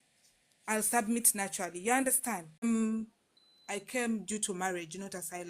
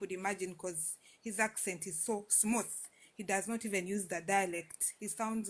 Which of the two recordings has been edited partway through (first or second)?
first